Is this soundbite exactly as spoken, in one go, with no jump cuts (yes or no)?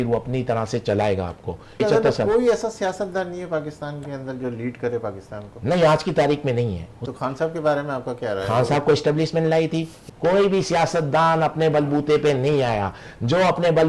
no